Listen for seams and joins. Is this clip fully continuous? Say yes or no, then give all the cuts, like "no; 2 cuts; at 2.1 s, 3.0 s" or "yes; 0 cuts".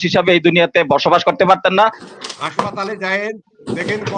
no; 1 cut; at 1.8 s